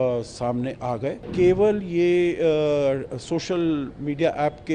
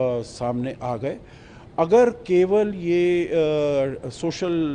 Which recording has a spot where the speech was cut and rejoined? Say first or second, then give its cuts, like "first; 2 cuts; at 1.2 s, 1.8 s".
first; 1 cut; at 1.3 s